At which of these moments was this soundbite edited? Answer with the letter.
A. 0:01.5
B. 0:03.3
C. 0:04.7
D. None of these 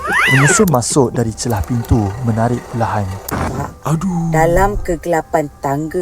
B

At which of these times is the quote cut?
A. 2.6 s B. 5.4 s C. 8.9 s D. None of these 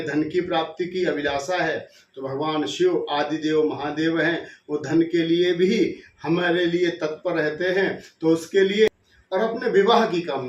C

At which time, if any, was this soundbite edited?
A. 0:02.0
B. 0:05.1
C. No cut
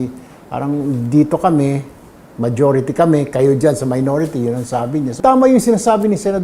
B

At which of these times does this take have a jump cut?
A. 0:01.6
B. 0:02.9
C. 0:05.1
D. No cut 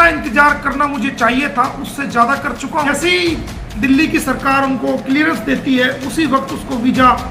B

